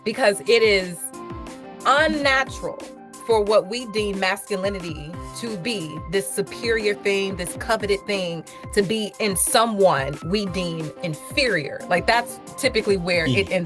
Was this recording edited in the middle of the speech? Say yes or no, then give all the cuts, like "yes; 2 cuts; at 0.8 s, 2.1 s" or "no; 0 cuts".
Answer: no; 0 cuts